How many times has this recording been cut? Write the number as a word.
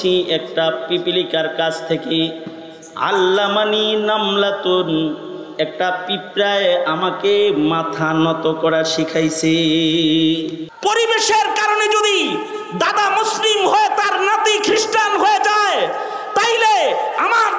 one